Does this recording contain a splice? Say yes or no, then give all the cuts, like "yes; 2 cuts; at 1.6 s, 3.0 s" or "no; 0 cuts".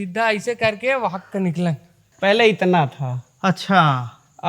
yes; 1 cut; at 2.1 s